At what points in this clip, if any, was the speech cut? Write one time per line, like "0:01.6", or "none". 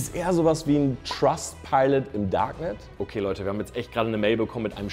0:02.8